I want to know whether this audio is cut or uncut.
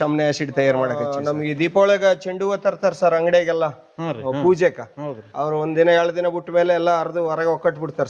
cut